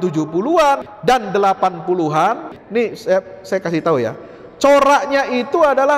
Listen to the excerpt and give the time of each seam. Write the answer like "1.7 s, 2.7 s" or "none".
0.9 s, 2.5 s

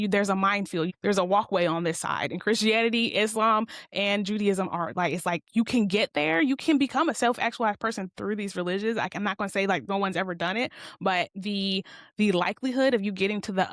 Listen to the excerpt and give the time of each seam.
0.9 s

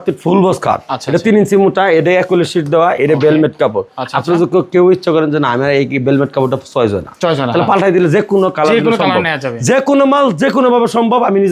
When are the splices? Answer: none

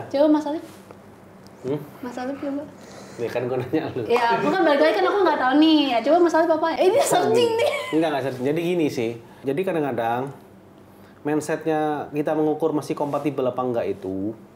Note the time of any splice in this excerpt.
none

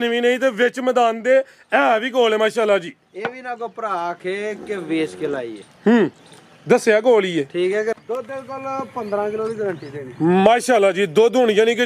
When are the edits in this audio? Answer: 8.0 s

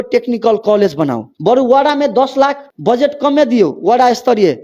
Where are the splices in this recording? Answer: 1.3 s, 2.7 s

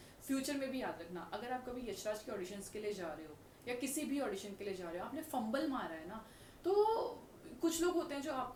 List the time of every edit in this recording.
none

